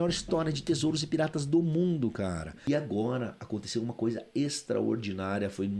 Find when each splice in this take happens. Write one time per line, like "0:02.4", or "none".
0:02.7